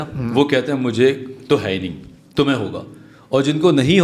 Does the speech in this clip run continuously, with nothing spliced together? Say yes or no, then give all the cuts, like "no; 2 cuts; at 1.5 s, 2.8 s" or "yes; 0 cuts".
yes; 0 cuts